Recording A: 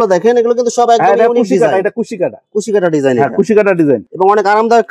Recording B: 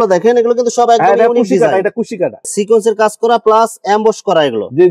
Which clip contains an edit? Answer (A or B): B